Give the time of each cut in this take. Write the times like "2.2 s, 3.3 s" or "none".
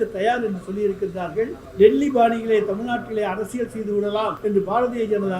1.6 s, 4.4 s